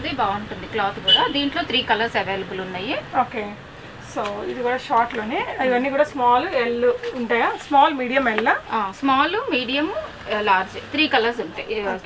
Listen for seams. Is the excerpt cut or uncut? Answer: uncut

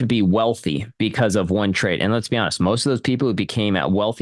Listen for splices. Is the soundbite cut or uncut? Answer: uncut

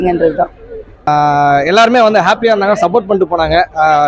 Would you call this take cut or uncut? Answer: cut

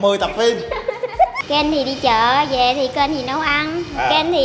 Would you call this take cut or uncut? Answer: cut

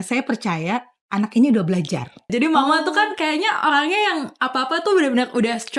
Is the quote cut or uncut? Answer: cut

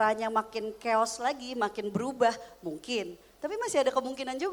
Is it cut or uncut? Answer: uncut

